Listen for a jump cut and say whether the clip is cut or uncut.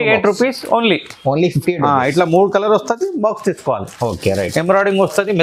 uncut